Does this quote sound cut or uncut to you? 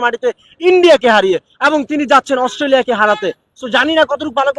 uncut